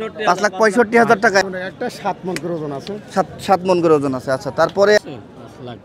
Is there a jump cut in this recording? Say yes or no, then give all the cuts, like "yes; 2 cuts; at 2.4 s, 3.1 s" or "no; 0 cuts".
yes; 2 cuts; at 1.4 s, 5.0 s